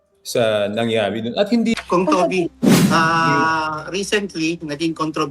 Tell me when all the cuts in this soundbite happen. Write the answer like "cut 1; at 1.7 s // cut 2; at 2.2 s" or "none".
cut 1; at 1.8 s

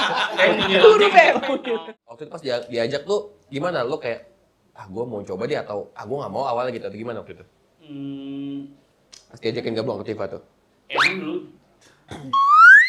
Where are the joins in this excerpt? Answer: cut 1; at 1.6 s

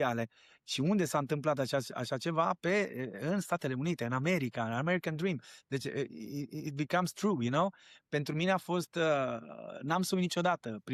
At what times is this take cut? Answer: none

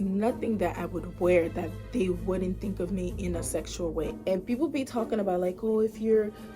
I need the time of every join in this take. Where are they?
cut 1; at 4.1 s

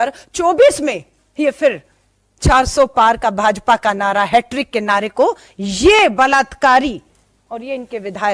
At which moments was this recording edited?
none

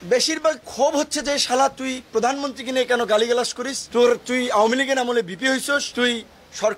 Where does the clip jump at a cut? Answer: none

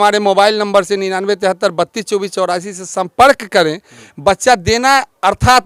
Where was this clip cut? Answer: none

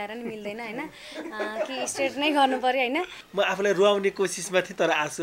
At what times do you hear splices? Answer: cut 1; at 3.2 s

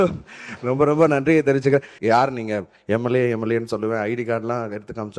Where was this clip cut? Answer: cut 1; at 1.9 s

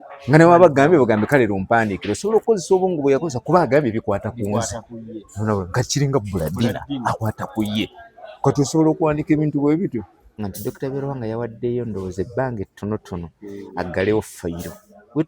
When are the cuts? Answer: cut 1; at 10.4 s

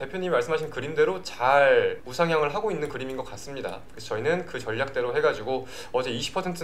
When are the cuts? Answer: cut 1; at 2.0 s // cut 2; at 3.9 s

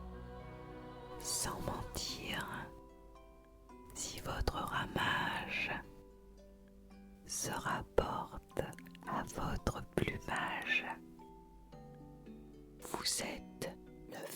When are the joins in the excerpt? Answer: cut 1; at 1.4 s

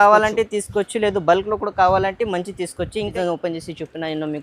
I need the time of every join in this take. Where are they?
cut 1; at 3.1 s

